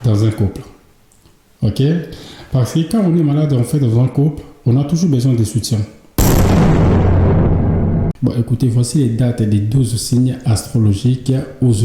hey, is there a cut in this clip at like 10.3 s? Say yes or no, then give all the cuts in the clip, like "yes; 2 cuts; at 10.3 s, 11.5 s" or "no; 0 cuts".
no; 2 cuts; at 6.2 s, 8.1 s